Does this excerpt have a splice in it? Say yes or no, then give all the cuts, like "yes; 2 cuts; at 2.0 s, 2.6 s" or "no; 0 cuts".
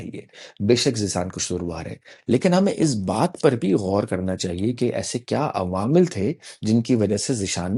no; 0 cuts